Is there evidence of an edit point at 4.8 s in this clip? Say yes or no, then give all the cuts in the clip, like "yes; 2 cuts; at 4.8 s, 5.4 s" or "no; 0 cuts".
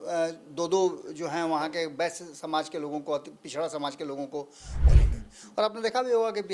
yes; 1 cut; at 4.8 s